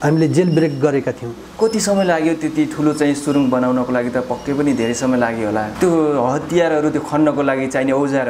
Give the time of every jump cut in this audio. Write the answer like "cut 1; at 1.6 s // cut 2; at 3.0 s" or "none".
cut 1; at 5.7 s